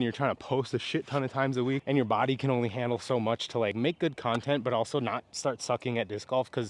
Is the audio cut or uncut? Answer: uncut